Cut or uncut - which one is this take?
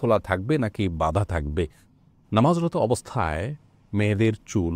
uncut